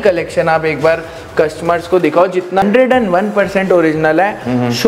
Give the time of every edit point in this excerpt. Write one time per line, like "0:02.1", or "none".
0:02.6